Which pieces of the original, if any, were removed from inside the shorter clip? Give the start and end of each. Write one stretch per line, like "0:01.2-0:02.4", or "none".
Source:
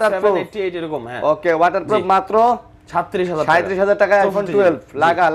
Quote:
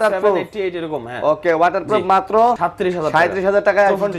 0:02.7-0:03.0